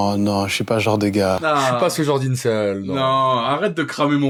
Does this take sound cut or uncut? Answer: uncut